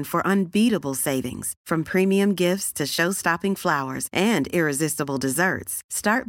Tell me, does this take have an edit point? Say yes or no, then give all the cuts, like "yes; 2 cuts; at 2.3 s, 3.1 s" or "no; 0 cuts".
no; 0 cuts